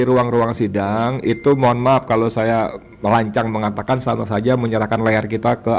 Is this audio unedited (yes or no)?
yes